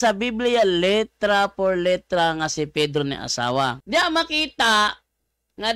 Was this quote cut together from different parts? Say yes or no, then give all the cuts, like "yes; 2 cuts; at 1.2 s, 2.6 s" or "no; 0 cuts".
yes; 1 cut; at 3.8 s